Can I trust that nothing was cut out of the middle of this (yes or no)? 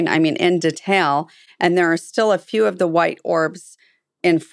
yes